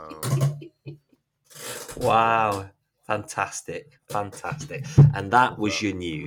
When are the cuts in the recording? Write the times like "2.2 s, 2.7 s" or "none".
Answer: none